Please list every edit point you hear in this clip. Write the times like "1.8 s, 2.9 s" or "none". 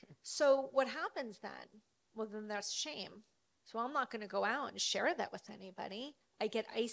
none